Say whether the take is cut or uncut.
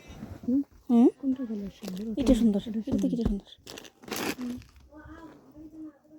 uncut